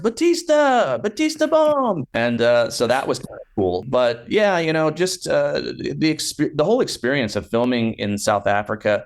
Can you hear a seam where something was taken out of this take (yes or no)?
yes